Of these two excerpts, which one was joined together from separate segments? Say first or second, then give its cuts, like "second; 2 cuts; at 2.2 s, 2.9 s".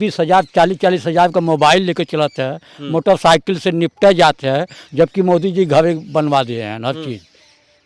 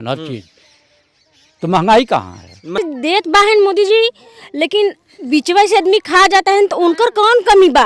second; 1 cut; at 2.8 s